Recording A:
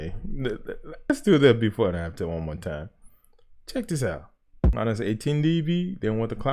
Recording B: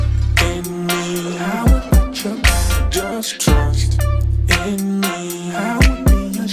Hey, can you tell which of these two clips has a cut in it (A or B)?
A